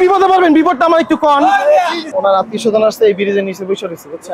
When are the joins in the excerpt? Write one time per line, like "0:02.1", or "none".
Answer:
0:02.0